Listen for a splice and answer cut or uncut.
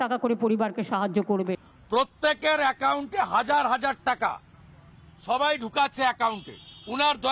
cut